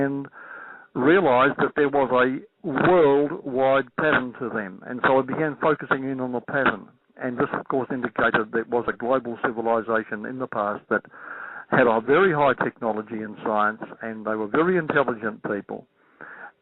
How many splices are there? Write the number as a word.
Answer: one